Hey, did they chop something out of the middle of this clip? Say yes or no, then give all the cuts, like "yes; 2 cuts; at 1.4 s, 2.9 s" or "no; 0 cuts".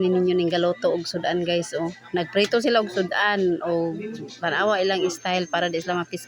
no; 0 cuts